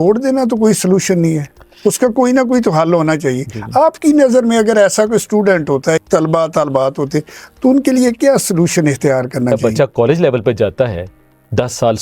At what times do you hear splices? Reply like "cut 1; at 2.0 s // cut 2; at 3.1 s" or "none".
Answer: cut 1; at 6.0 s // cut 2; at 9.6 s